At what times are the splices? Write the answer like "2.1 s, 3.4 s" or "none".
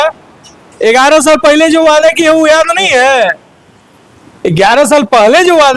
none